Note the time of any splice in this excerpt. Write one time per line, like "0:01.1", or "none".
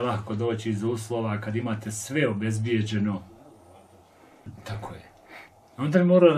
0:04.6